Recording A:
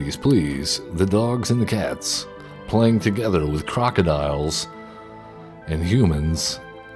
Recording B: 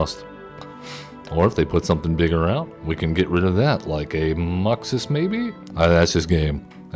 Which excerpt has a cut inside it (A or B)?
B